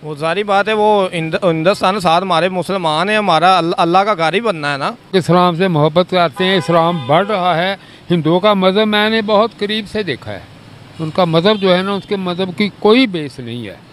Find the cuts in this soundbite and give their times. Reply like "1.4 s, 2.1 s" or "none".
5.1 s